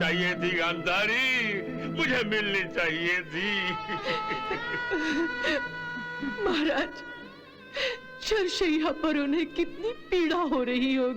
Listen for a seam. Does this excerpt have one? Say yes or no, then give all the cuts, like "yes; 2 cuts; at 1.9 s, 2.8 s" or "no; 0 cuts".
no; 0 cuts